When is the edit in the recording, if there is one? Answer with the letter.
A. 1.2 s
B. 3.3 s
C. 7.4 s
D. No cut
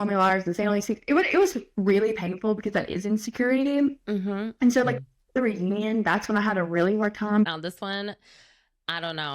C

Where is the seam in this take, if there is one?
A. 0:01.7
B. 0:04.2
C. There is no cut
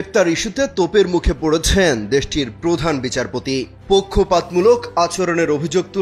C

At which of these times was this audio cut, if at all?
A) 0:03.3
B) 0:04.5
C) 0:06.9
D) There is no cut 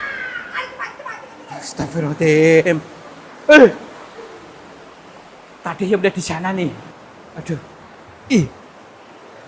C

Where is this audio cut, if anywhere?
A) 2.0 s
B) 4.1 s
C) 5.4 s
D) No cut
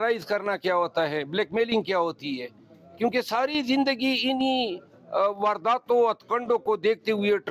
D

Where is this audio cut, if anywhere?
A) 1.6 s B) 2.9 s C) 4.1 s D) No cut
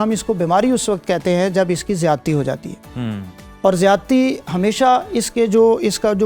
D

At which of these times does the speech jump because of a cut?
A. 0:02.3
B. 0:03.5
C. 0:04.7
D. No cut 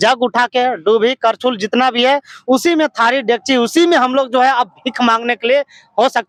D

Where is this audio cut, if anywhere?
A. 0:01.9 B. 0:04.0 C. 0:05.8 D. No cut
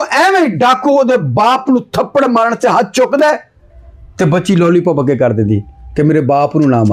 D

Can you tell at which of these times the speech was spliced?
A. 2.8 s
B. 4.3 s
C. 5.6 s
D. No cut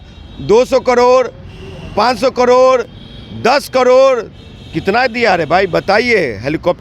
D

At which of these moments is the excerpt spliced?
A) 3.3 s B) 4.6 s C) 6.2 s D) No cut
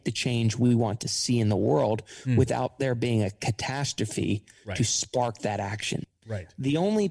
C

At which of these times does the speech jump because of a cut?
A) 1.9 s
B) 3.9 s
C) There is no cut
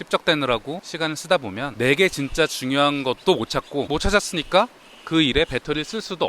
B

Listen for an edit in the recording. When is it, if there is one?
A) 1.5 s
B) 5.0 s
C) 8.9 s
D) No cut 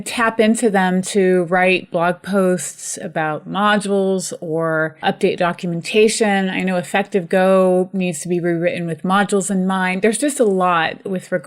B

